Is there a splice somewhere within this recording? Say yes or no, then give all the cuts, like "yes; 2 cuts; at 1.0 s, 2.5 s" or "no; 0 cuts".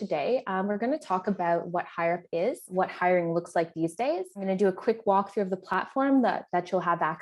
yes; 2 cuts; at 2.7 s, 4.4 s